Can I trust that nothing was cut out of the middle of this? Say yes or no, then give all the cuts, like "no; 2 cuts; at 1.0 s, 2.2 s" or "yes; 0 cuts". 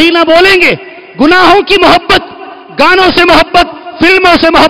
yes; 0 cuts